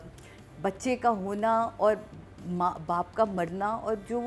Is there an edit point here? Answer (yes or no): no